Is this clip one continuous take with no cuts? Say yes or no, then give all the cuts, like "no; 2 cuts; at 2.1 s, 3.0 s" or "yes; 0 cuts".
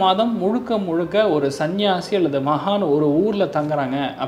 yes; 0 cuts